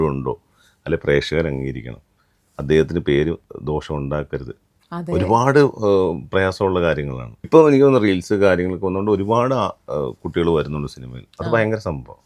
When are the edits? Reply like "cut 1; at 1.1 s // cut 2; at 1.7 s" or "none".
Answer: cut 1; at 7.3 s

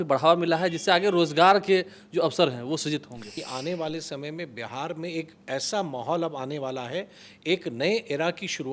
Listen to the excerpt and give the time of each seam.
cut 1; at 3.2 s

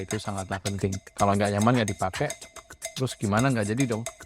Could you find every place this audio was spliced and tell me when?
cut 1; at 1.1 s

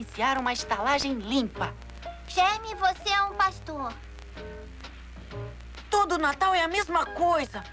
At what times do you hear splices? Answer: none

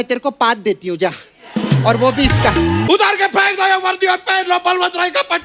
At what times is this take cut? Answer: cut 1; at 2.8 s

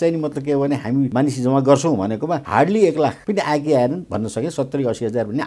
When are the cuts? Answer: cut 1; at 1.1 s // cut 2; at 2.4 s // cut 3; at 3.2 s

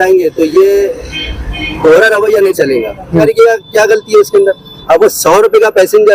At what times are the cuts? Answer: cut 1; at 3.2 s

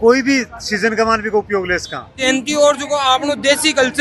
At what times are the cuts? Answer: cut 1; at 2.2 s

